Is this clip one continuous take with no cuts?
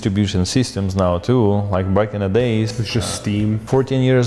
yes; 0 cuts

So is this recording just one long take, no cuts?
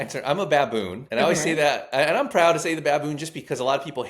no; 1 cut; at 1.0 s

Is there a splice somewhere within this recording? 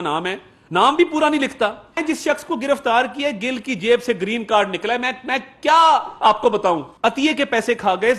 yes; 2 cuts; at 2.0 s, 6.9 s

